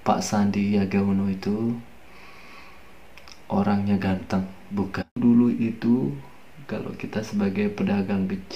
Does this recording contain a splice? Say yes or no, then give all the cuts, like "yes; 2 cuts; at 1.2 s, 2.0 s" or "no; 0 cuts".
yes; 1 cut; at 5.2 s